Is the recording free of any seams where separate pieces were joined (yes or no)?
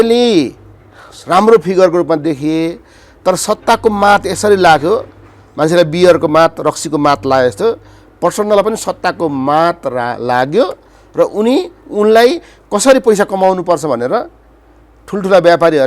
yes